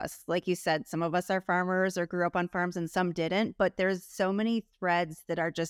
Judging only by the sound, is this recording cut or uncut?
uncut